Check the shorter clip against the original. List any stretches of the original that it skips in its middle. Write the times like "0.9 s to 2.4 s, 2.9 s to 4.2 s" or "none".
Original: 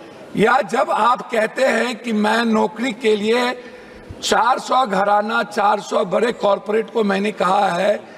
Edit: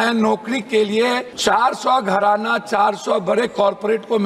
3.6 s to 4.1 s